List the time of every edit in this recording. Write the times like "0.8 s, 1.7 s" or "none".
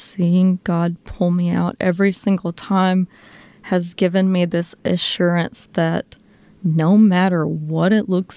none